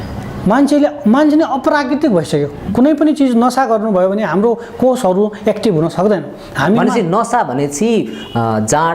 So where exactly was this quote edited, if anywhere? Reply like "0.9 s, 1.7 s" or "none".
2.7 s